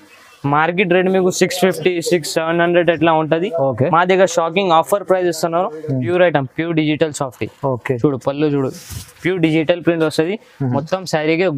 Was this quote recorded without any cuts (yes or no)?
no